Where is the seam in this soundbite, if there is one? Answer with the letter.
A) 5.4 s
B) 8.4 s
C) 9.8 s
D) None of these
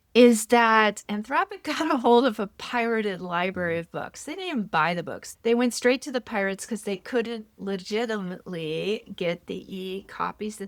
D